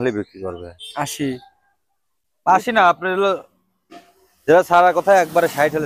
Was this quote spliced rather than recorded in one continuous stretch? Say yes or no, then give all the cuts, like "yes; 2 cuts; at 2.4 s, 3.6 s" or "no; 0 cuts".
no; 0 cuts